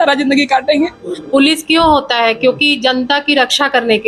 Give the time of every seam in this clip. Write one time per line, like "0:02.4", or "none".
0:01.1